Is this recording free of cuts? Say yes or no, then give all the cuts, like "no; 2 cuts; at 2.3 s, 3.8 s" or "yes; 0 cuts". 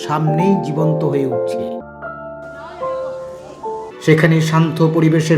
no; 2 cuts; at 1.8 s, 3.9 s